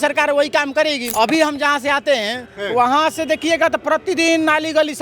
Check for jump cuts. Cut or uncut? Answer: cut